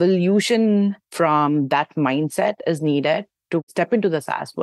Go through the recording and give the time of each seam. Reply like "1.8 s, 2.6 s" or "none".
1.0 s, 3.7 s